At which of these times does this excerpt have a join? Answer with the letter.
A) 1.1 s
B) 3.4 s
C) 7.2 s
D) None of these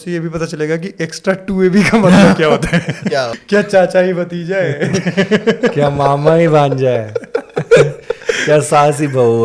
B